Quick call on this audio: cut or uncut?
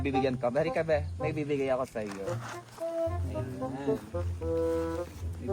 uncut